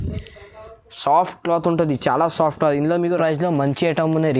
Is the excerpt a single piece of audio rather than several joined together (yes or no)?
no